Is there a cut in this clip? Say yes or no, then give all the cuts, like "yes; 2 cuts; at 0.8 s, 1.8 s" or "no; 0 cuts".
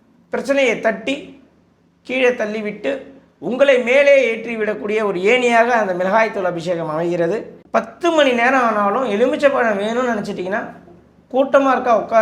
yes; 1 cut; at 7.6 s